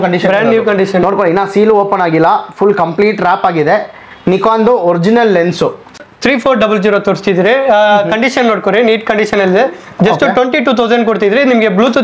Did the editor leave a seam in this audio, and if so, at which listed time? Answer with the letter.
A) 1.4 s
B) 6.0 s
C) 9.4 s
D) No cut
B